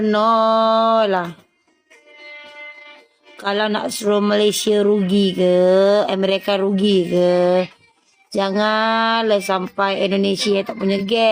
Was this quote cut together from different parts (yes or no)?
no